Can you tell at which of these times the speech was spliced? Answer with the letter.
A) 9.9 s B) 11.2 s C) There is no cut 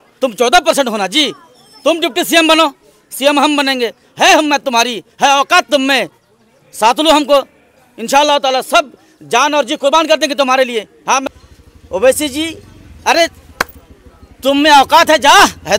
B